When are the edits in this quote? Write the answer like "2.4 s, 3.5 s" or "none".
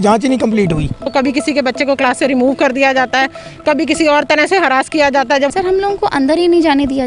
1.0 s, 5.5 s